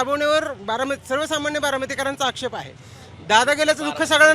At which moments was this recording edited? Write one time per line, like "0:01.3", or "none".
none